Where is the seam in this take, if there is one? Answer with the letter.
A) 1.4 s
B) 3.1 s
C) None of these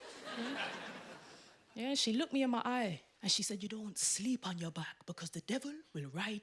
B